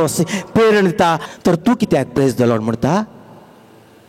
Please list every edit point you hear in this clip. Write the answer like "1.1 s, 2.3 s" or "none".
1.3 s